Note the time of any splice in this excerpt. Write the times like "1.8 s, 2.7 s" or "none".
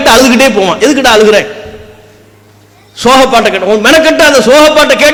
none